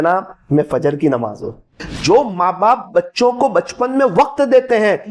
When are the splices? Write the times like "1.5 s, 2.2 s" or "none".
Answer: 1.9 s